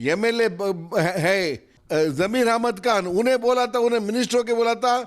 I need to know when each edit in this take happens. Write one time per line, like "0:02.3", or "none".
0:01.7